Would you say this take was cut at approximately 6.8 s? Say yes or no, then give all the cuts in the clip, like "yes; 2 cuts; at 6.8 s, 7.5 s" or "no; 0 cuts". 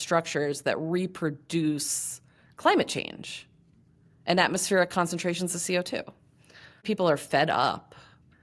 yes; 1 cut; at 6.8 s